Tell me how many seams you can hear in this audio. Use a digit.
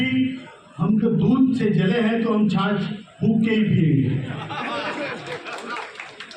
0